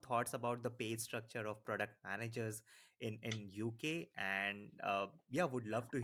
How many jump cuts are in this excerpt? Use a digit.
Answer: 0